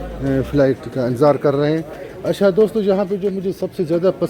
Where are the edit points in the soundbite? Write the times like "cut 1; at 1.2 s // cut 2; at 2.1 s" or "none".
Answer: none